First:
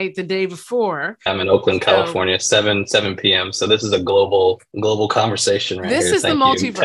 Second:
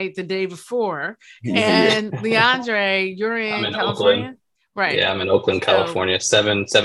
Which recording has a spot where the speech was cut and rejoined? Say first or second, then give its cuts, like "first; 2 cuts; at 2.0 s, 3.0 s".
first; 2 cuts; at 1.3 s, 4.7 s